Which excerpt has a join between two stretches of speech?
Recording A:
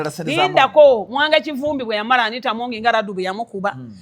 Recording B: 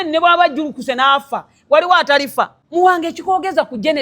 B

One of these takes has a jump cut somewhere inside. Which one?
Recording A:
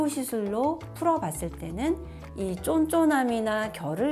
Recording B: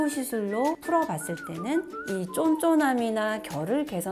B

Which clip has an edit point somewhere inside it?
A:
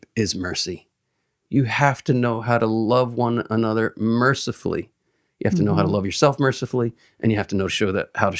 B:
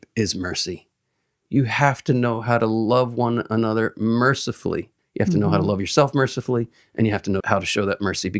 B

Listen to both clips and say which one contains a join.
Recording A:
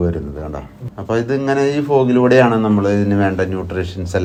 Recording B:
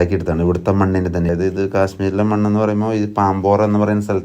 B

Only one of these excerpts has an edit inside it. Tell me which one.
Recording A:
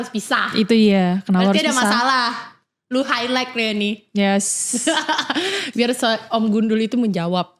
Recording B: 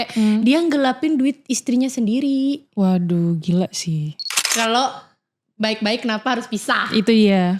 B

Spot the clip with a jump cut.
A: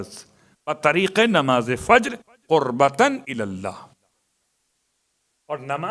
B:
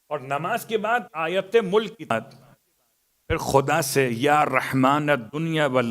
B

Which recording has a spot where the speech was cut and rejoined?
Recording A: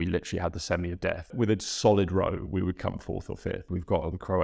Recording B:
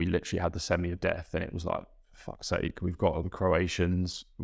A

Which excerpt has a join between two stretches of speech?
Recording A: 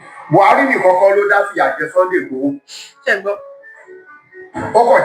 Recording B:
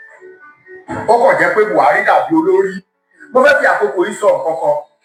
A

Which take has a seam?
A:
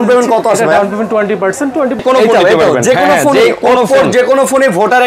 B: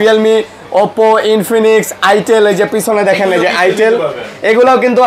A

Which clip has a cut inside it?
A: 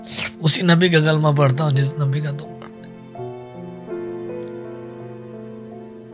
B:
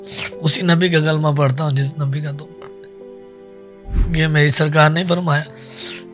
B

